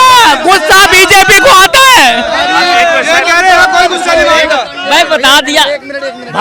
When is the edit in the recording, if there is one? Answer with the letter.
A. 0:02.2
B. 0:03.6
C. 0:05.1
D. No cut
D